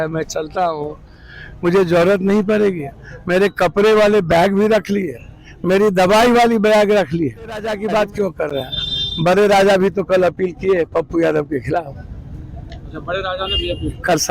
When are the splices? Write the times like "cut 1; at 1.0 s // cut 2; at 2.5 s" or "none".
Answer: cut 1; at 7.7 s